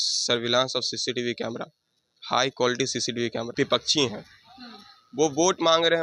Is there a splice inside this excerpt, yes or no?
yes